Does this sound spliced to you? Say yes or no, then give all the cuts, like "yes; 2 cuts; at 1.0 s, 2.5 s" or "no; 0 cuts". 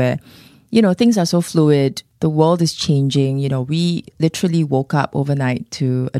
no; 0 cuts